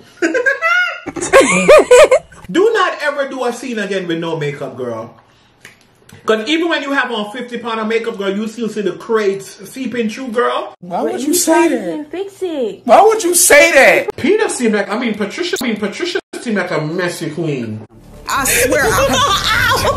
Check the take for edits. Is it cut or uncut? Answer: cut